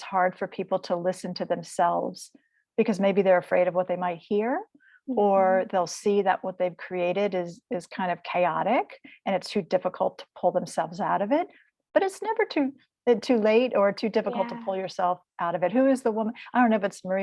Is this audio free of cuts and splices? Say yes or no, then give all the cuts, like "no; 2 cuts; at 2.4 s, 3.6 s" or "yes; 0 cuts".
yes; 0 cuts